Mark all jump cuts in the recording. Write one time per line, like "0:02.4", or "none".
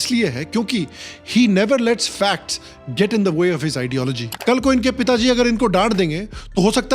0:04.2